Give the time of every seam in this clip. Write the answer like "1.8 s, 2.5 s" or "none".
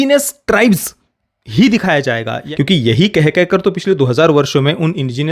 2.4 s